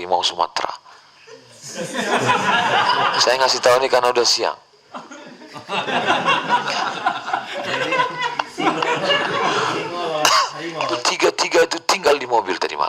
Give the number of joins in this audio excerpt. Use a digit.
1